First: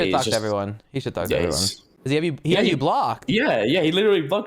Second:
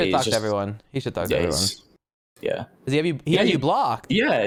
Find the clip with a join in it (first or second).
first